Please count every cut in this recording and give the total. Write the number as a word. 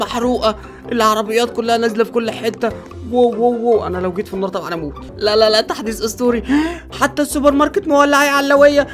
one